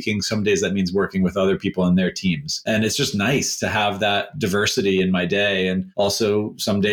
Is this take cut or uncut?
cut